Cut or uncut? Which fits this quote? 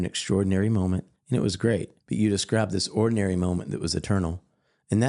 cut